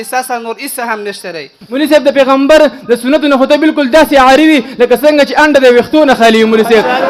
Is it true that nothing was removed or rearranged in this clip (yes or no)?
no